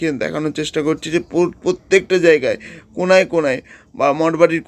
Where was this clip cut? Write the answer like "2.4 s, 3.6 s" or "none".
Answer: none